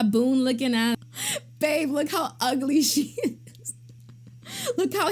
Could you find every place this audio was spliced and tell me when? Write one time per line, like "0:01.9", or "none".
0:00.9